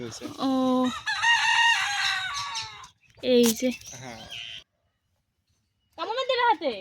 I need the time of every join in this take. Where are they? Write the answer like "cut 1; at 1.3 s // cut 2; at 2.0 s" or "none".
cut 1; at 4.7 s